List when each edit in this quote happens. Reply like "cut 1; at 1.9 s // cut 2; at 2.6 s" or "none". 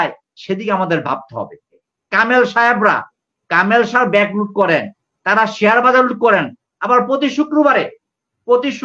cut 1; at 1.8 s